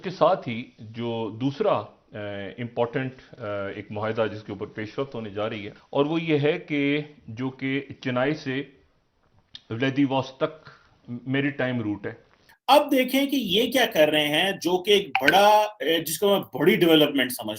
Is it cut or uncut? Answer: cut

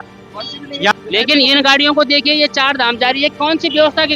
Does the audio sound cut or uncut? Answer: cut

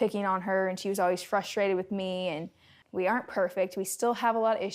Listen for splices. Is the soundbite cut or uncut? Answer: cut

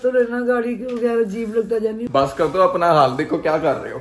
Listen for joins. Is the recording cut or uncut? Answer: cut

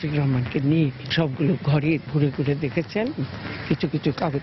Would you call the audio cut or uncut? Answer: uncut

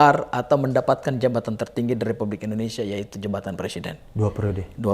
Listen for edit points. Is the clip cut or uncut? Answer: uncut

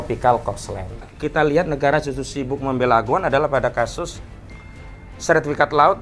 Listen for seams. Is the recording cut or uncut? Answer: cut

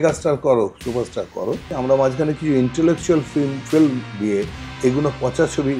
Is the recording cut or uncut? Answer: cut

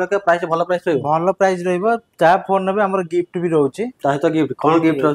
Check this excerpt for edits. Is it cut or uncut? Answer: uncut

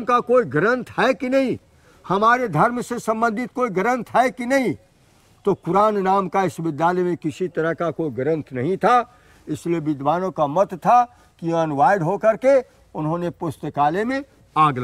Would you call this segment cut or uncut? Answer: uncut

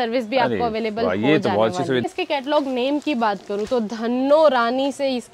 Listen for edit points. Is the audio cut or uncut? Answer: cut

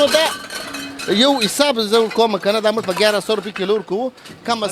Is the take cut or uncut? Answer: uncut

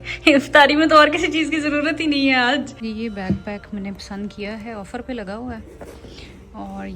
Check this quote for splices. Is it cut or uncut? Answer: cut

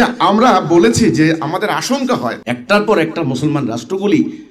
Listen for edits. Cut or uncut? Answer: cut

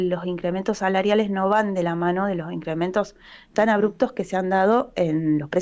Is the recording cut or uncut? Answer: uncut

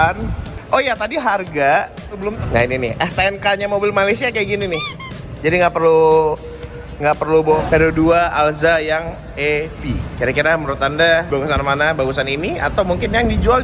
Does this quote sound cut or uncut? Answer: cut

